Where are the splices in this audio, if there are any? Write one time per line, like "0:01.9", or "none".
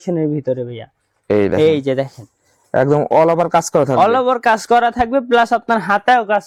none